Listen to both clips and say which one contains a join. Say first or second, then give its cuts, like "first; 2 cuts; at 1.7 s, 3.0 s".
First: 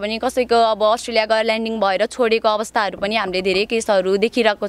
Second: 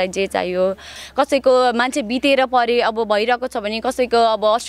second; 1 cut; at 1.0 s